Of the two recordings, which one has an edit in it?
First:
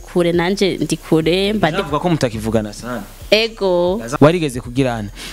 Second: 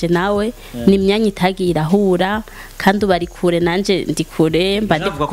first; 2 cuts; at 3.0 s, 4.1 s

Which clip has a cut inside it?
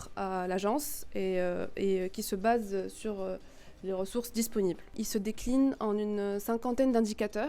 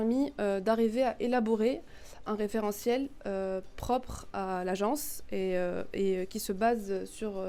first; 1 cut; at 4.9 s

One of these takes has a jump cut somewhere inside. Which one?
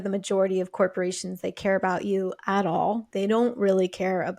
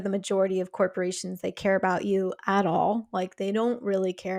first; 1 cut; at 3.1 s

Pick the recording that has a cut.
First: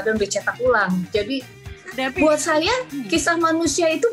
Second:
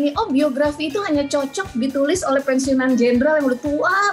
first; 1 cut; at 1.6 s

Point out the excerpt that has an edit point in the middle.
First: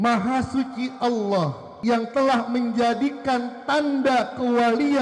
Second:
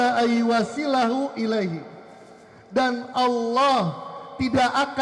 first; 1 cut; at 1.7 s

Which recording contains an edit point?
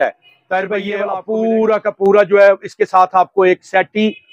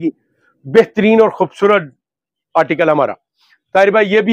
first; 1 cut; at 1.0 s

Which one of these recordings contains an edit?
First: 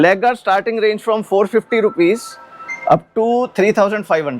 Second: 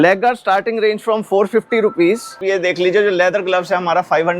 second; 1 cut; at 2.4 s

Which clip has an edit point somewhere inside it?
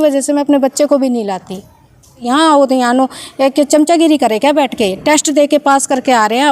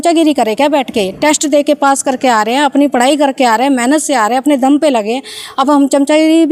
first; 1 cut; at 2.2 s

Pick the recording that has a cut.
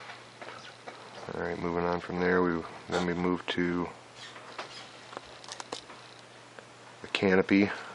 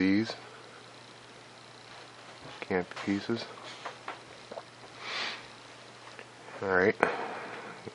first; 1 cut; at 2.6 s

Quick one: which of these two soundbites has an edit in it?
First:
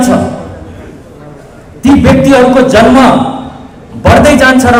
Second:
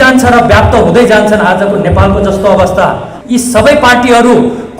second; 1 cut; at 3.1 s

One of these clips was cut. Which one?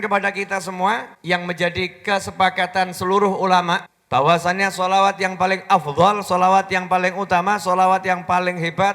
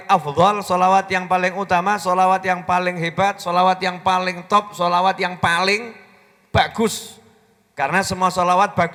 first; 2 cuts; at 1.1 s, 3.9 s

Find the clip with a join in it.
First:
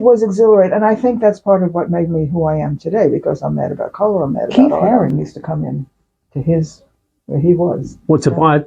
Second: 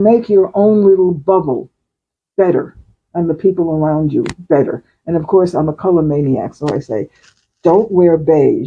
first; 1 cut; at 4.5 s

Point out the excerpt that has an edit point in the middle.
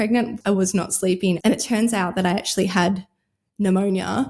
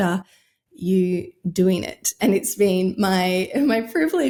first; 1 cut; at 1.4 s

